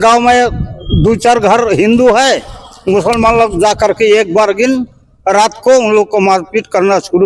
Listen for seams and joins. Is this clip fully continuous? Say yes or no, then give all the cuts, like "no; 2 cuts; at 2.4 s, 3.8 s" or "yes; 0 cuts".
yes; 0 cuts